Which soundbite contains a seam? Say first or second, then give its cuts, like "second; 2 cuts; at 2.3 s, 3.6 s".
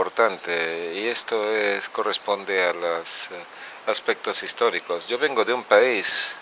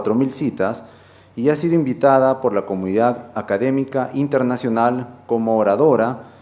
second; 1 cut; at 1.3 s